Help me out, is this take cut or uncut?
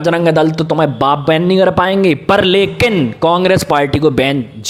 uncut